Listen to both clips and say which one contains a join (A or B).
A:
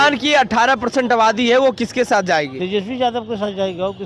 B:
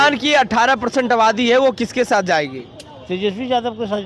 A